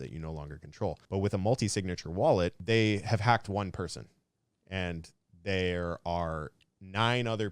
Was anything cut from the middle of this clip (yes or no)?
yes